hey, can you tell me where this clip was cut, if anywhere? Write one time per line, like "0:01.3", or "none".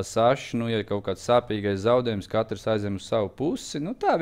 none